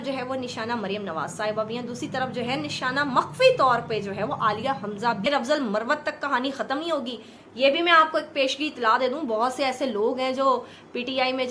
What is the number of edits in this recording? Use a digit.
1